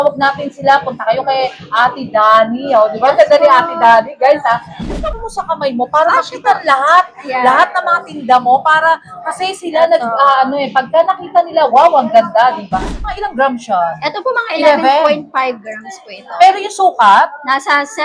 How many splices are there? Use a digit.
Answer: 2